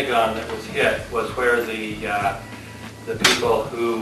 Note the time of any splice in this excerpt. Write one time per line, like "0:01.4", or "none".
none